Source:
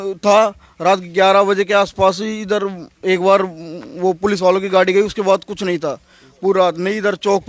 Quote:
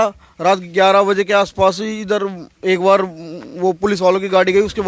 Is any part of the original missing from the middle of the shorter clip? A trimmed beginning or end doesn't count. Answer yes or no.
no